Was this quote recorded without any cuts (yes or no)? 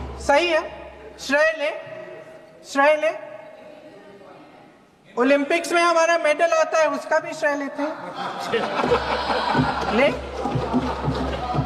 yes